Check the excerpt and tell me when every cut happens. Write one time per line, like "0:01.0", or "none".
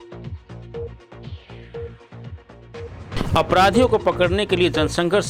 none